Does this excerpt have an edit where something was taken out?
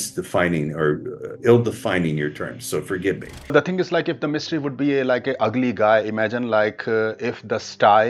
yes; 1 cut; at 3.3 s

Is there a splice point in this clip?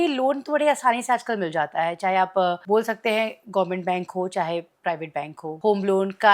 yes; 2 cuts; at 2.6 s, 5.5 s

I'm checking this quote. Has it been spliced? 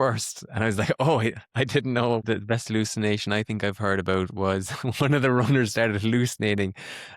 yes; 1 cut; at 2.2 s

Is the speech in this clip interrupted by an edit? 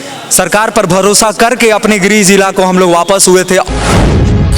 yes; 1 cut; at 3.6 s

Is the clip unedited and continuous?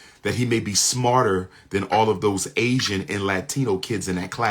yes; 0 cuts

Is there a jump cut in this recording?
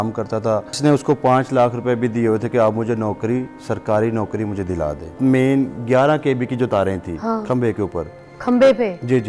yes; 2 cuts; at 0.8 s, 5.2 s

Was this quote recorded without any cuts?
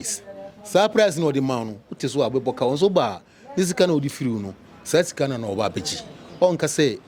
yes; 0 cuts

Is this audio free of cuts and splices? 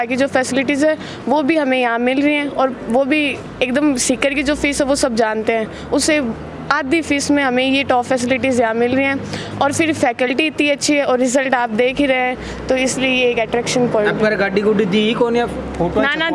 yes; 0 cuts

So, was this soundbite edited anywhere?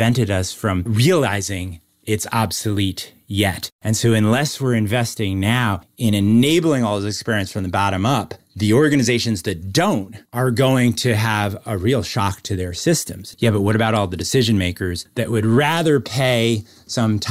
yes; 1 cut; at 13.3 s

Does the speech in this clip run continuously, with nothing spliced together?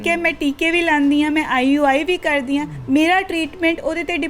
no; 1 cut; at 2.7 s

